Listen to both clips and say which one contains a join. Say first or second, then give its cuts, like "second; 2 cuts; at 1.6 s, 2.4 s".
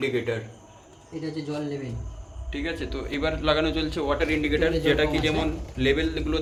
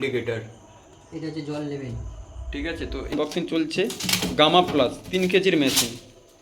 second; 1 cut; at 3.1 s